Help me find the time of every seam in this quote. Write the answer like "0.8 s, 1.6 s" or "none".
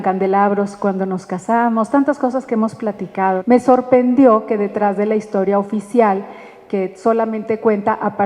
3.4 s